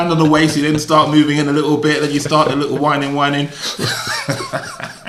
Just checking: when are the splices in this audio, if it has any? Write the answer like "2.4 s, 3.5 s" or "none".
none